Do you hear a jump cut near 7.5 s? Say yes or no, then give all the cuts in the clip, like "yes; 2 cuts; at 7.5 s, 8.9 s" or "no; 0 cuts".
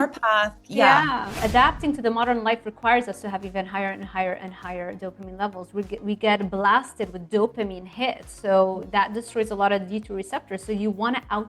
no; 1 cut; at 1.4 s